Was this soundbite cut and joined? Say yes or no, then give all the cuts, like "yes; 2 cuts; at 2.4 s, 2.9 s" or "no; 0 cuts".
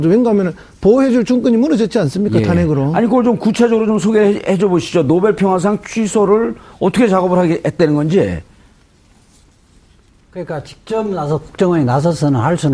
no; 0 cuts